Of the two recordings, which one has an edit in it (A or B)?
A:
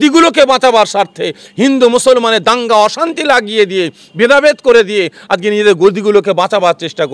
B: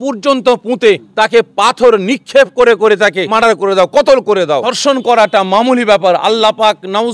B